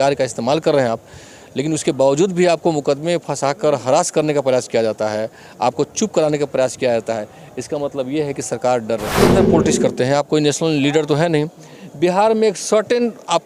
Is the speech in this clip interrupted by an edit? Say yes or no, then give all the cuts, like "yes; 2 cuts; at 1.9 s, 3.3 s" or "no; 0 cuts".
yes; 1 cut; at 9.1 s